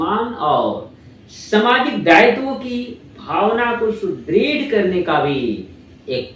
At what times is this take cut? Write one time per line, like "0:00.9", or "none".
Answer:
none